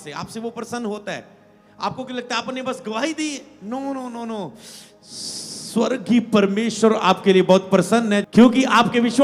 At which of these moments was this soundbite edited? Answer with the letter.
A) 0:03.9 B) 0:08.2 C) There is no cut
B